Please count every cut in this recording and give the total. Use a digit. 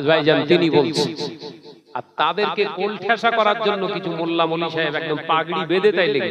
0